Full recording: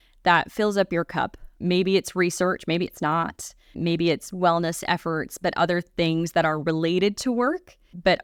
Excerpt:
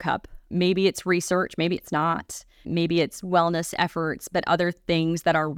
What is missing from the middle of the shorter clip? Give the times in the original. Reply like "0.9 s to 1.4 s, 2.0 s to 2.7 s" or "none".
none